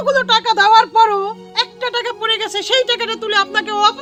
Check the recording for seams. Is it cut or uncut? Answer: uncut